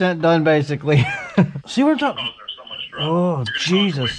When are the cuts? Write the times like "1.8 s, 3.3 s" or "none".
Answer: 1.6 s